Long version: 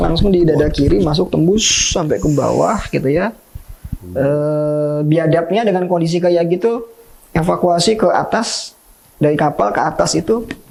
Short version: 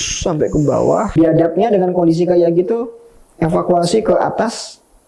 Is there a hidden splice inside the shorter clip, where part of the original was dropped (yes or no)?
yes